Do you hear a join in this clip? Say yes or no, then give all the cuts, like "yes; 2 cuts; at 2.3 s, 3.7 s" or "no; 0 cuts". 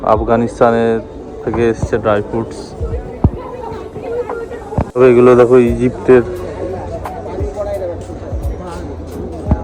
no; 0 cuts